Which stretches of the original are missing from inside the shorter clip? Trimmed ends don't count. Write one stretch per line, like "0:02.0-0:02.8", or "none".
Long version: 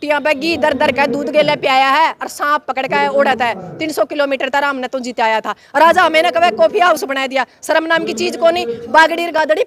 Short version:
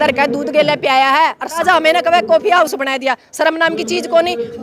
0:02.4-0:05.9

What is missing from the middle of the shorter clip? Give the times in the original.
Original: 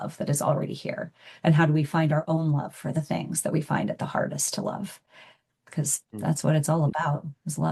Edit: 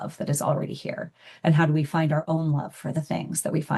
none

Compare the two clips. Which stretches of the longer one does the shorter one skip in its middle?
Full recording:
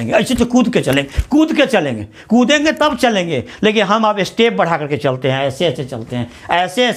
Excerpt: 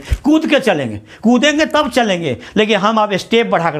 none

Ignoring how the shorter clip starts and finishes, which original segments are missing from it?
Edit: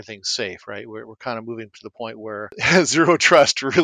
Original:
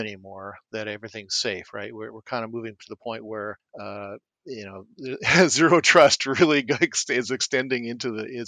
0:03.6-0:05.2

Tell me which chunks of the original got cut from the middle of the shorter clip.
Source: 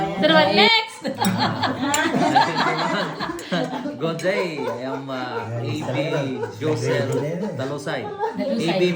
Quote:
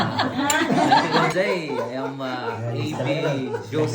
0:02.7-0:04.1

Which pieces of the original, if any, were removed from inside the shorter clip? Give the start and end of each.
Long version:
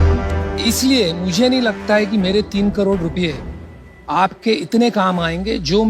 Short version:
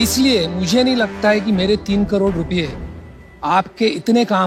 none

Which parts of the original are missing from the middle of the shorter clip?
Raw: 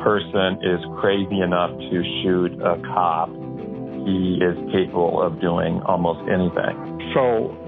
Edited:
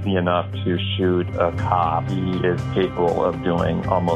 0:03.4-0:04.1

